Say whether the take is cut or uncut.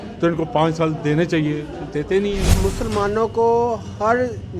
cut